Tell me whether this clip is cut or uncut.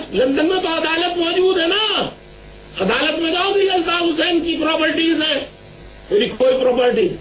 cut